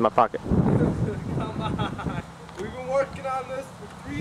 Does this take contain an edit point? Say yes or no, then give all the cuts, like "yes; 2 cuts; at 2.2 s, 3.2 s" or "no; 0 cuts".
yes; 1 cut; at 2.2 s